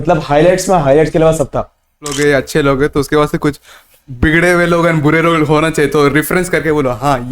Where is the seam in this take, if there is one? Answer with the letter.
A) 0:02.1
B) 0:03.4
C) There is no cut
A